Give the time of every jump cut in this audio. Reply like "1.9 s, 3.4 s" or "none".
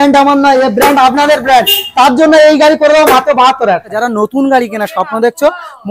4.0 s